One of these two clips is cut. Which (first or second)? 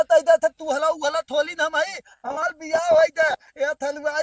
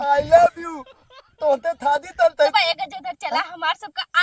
second